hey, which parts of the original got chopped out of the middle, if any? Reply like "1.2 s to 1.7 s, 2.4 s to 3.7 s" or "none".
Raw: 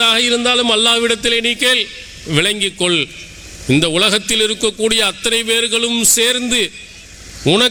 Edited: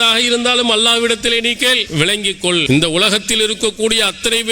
2.1 s to 3.1 s